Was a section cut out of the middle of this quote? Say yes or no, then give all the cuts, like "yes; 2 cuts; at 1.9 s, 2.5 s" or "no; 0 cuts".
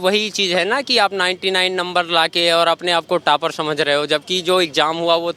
no; 0 cuts